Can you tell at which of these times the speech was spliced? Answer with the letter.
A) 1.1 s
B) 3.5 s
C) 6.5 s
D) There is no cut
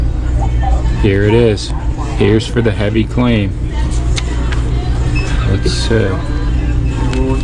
C